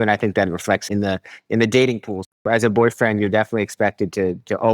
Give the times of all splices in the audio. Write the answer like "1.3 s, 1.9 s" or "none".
0.8 s, 2.3 s